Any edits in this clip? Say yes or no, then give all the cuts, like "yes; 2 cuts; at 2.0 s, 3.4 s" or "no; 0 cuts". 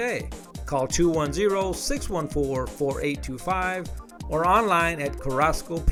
no; 0 cuts